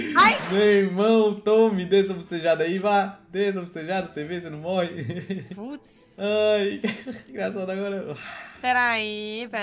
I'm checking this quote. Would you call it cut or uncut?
uncut